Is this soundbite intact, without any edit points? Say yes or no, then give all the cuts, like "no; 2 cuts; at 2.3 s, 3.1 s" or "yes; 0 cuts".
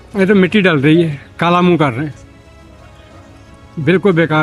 yes; 0 cuts